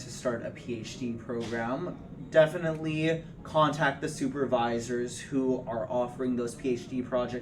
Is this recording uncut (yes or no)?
yes